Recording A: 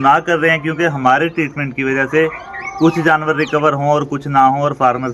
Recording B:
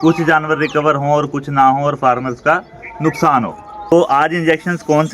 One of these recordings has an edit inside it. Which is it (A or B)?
B